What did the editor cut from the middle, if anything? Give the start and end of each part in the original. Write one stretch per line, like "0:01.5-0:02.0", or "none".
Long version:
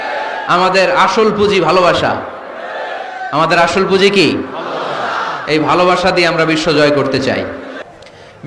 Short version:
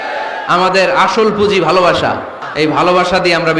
0:02.4-0:05.3